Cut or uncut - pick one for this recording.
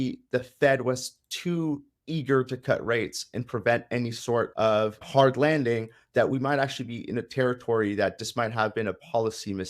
cut